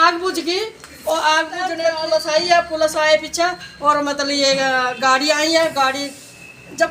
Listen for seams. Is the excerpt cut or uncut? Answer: cut